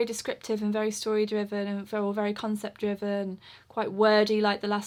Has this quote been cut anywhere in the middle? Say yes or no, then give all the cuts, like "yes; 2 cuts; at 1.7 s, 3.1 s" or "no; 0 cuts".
no; 0 cuts